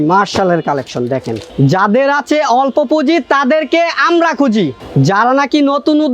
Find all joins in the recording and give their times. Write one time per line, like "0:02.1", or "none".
0:01.4
0:04.8